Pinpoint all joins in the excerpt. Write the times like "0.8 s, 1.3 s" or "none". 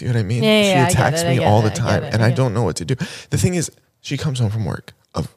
none